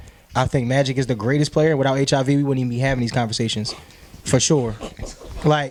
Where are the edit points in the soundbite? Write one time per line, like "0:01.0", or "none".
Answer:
none